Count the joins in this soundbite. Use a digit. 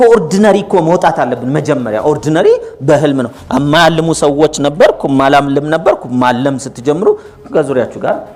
0